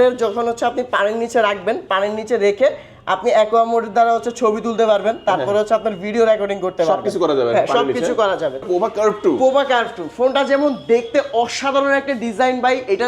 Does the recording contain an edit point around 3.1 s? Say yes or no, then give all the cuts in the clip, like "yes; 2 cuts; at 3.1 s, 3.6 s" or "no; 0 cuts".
no; 1 cut; at 8.6 s